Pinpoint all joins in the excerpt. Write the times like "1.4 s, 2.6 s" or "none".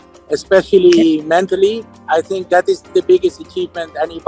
1.9 s